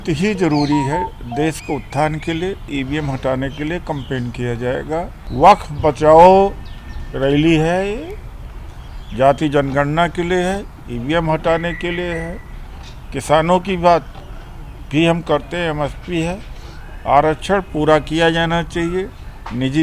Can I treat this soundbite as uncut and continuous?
no; 2 cuts; at 2.7 s, 5.2 s

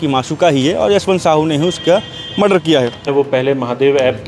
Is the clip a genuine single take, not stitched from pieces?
no; 1 cut; at 3.1 s

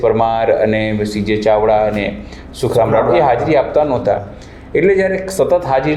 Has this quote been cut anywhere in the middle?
no; 0 cuts

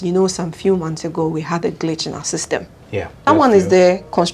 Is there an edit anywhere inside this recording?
yes; 1 cut; at 3.2 s

